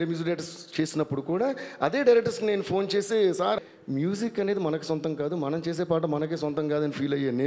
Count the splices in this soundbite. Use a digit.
1